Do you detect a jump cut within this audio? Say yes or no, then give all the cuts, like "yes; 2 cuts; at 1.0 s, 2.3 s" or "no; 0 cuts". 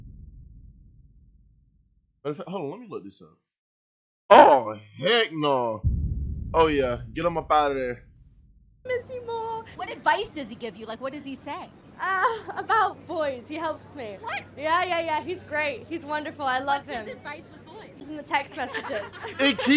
yes; 1 cut; at 17.9 s